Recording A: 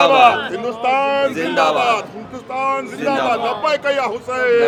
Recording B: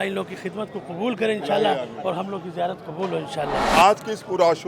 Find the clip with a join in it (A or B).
B